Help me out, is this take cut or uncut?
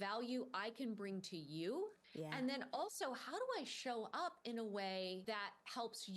cut